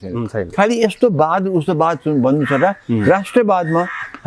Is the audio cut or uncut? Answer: uncut